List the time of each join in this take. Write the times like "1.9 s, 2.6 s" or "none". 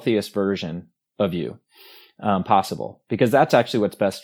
none